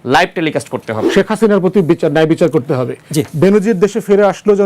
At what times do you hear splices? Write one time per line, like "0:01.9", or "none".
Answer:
0:01.0